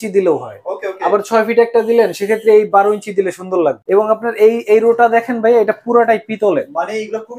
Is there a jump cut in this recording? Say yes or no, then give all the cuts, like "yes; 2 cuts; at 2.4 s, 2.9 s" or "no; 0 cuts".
yes; 1 cut; at 3.8 s